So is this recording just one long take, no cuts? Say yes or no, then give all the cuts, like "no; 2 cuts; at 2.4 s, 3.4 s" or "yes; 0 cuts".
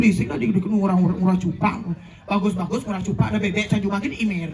yes; 0 cuts